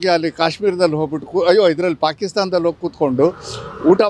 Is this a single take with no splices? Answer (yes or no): yes